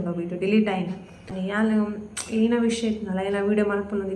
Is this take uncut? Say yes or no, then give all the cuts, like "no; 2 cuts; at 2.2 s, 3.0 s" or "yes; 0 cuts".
no; 1 cut; at 1.3 s